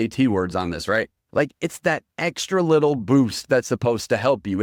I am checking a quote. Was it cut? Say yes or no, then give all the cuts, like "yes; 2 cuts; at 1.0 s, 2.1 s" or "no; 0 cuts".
no; 0 cuts